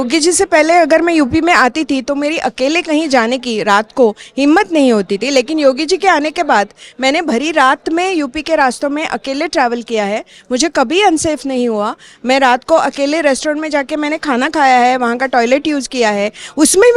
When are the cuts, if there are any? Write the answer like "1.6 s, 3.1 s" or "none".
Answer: none